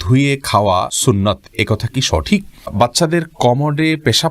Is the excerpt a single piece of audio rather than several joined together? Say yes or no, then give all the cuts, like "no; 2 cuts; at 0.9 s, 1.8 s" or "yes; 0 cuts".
no; 2 cuts; at 0.9 s, 2.7 s